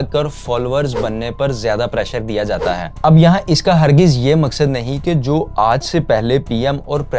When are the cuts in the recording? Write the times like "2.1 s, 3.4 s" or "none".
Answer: none